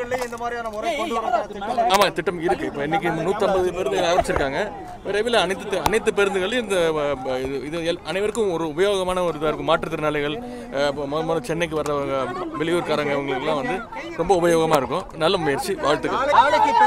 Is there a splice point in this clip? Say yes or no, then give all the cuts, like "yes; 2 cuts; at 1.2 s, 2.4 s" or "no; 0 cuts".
no; 0 cuts